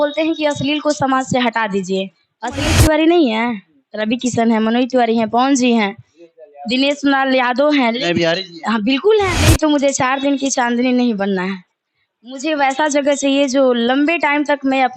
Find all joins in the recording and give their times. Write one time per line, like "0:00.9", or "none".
0:02.7
0:09.4